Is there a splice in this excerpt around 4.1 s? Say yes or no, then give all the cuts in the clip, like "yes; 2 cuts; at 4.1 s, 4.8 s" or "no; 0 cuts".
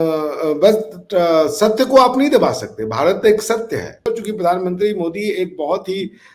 yes; 1 cut; at 4.1 s